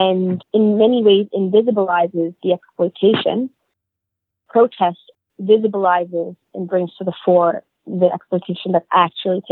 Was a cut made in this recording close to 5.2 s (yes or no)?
yes